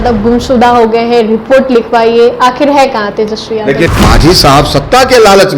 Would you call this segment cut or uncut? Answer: cut